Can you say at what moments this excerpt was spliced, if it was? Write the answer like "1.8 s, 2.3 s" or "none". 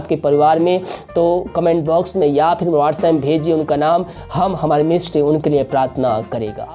none

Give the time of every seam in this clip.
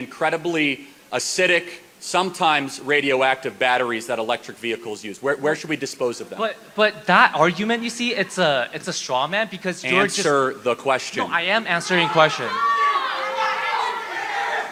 none

